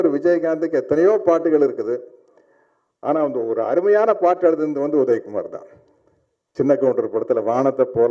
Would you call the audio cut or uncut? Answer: uncut